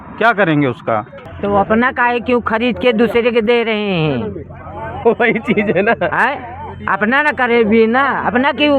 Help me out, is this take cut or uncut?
cut